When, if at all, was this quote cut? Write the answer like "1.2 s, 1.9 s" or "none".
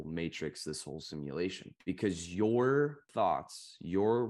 1.7 s, 3.1 s